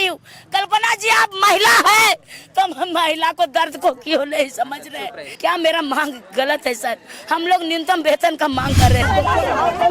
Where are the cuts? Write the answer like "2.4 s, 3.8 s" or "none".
5.2 s, 9.0 s